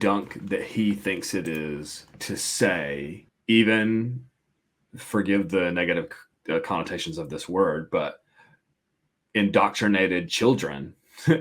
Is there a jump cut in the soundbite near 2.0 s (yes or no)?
no